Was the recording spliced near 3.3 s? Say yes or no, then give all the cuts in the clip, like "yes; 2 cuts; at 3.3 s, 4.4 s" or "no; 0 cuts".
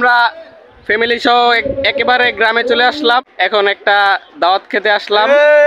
yes; 1 cut; at 3.3 s